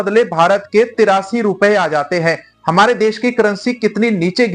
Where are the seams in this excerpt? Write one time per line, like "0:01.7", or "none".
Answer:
none